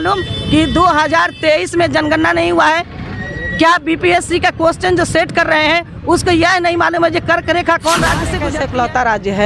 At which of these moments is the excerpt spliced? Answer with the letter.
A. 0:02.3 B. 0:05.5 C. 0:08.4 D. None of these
C